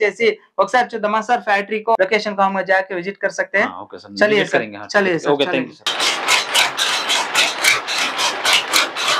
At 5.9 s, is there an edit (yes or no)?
yes